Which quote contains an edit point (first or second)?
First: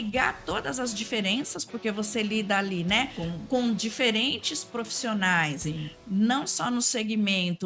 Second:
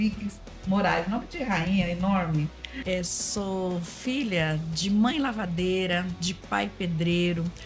second